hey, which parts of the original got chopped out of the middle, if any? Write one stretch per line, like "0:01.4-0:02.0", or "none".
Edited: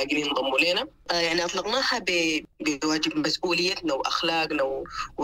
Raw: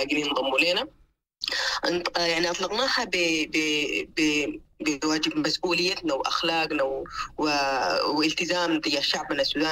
0:01.0-0:02.1
0:03.5-0:04.6